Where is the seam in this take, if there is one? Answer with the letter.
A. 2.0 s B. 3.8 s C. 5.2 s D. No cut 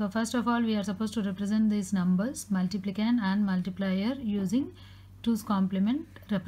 A